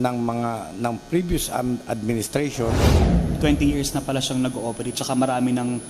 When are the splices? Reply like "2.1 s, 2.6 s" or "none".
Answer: 3.1 s

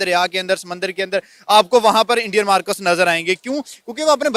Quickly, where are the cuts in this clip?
none

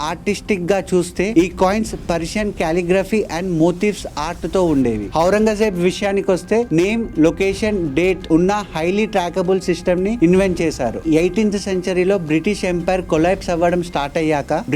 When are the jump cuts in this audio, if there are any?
5.0 s, 11.0 s

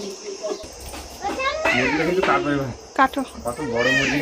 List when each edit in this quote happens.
1.2 s

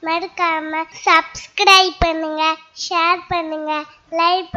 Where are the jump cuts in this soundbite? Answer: 0.9 s

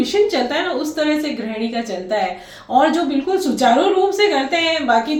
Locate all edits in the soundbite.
none

